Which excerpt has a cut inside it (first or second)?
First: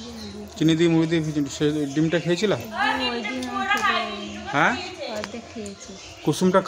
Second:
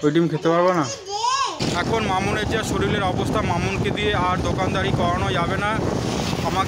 second